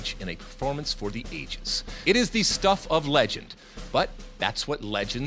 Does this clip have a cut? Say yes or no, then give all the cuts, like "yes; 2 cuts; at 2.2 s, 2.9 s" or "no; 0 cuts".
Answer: yes; 1 cut; at 2.0 s